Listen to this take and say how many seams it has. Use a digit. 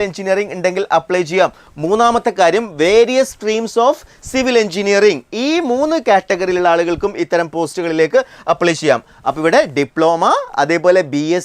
0